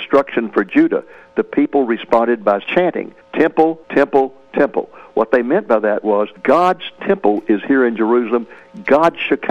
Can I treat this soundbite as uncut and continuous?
yes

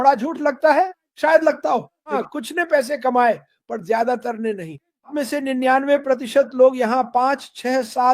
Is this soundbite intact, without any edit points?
no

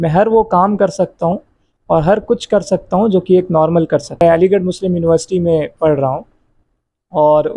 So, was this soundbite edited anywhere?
yes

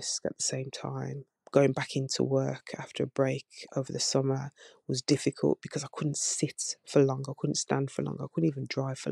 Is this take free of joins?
yes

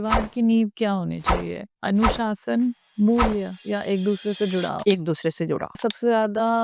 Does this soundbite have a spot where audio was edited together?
yes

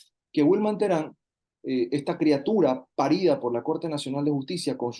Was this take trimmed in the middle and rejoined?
no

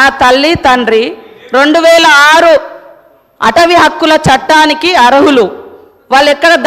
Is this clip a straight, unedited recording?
yes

